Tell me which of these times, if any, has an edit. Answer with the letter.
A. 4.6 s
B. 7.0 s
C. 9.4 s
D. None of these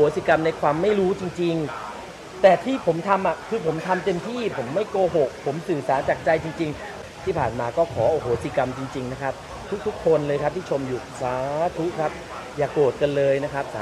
B